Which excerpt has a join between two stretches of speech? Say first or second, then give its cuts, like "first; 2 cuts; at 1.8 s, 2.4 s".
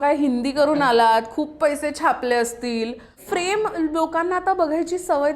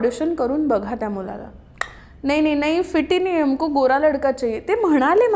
first; 1 cut; at 3.2 s